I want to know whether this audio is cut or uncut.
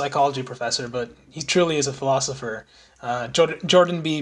uncut